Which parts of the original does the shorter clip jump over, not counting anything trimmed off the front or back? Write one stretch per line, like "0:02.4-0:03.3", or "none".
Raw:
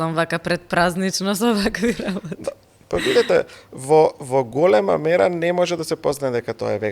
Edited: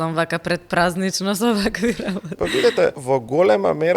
0:02.3-0:02.8
0:03.5-0:04.2